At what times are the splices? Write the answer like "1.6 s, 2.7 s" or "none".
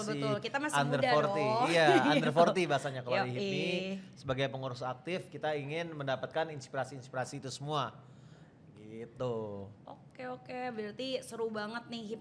none